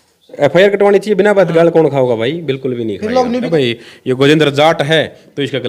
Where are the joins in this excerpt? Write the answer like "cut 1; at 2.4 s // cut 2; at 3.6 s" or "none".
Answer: cut 1; at 3.5 s